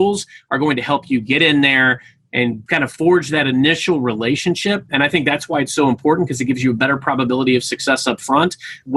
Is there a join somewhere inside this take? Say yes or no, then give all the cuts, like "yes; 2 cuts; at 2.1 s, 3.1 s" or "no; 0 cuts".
yes; 1 cut; at 2.6 s